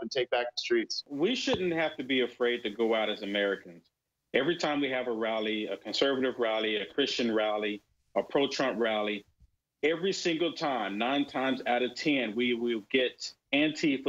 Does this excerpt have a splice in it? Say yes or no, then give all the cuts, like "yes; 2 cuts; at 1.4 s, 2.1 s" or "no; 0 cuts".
yes; 1 cut; at 1.0 s